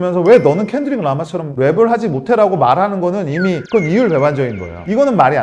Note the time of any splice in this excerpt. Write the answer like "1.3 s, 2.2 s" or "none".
none